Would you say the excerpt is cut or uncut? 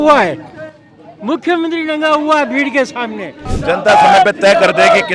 cut